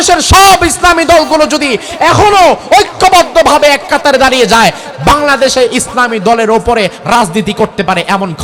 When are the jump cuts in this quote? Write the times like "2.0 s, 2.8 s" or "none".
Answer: none